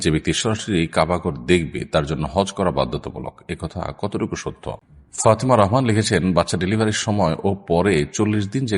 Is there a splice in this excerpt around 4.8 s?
yes; 1 cut; at 4.8 s

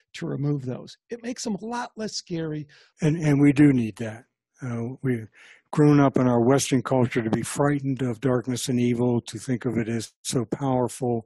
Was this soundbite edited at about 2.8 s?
yes; 1 cut; at 2.8 s

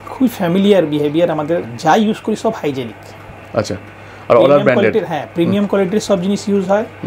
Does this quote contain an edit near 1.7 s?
yes; 1 cut; at 1.7 s

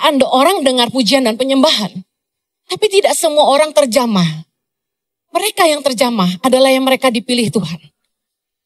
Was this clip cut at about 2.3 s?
no; 0 cuts

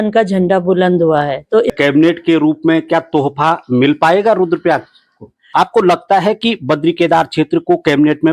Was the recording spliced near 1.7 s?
yes; 2 cuts; at 1.7 s, 5.4 s

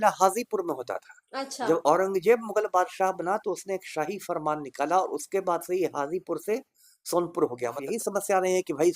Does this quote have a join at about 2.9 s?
no; 1 cut; at 7.8 s

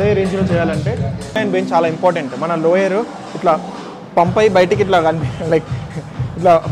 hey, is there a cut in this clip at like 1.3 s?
yes; 1 cut; at 1.3 s

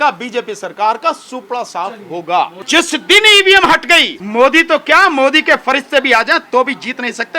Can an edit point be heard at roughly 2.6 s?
yes; 2 cuts; at 2.6 s, 4.2 s

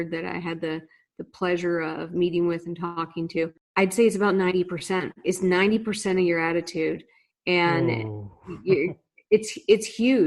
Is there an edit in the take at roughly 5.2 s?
no; 1 cut; at 3.6 s

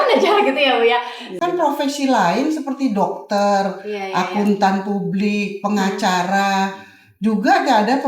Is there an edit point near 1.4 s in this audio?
yes; 1 cut; at 1.4 s

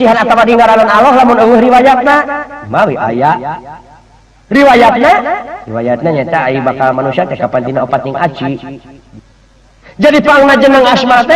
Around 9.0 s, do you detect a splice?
yes; 1 cut; at 9.0 s

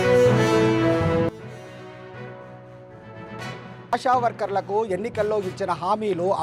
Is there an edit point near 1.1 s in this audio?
yes; 1 cut; at 1.1 s

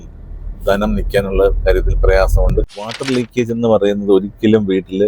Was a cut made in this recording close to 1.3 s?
no; 1 cut; at 3.0 s

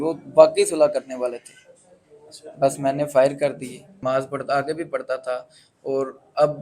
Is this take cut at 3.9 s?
yes; 1 cut; at 3.9 s

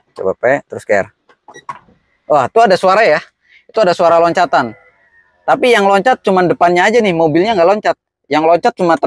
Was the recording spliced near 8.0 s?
no; 0 cuts

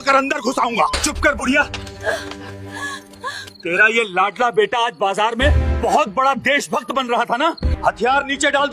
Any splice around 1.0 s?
yes; 2 cuts; at 1.0 s, 7.8 s

